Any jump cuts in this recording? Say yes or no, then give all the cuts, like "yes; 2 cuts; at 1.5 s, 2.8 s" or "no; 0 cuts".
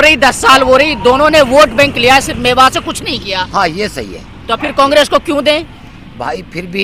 no; 0 cuts